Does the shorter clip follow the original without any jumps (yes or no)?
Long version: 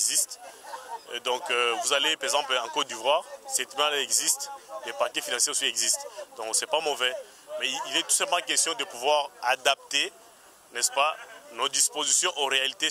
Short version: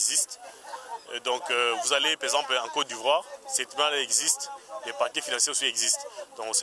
yes